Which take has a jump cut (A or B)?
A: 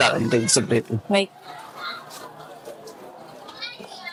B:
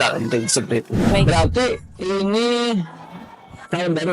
B